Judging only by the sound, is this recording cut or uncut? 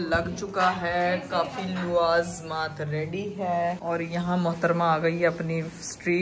uncut